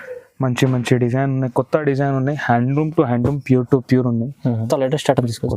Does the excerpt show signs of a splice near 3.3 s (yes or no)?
no